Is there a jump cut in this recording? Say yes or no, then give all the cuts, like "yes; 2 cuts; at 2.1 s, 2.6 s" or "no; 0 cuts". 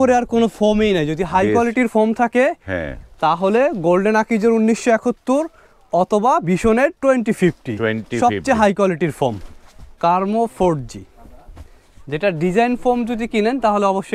yes; 1 cut; at 9.5 s